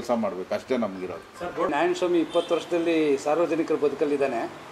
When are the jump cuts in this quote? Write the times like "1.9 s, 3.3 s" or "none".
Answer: 1.7 s